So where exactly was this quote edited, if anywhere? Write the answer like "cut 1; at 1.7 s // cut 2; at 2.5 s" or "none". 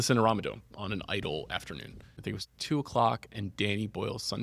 cut 1; at 2.2 s